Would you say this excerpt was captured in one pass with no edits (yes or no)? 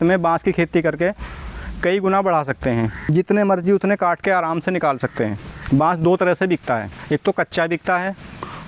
no